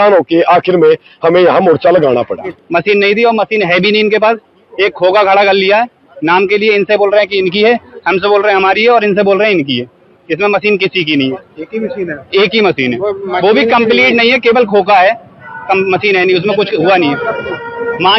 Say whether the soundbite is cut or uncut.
cut